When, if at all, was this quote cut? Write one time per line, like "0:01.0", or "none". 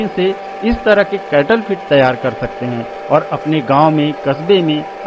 none